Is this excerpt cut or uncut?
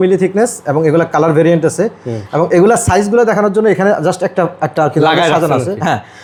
uncut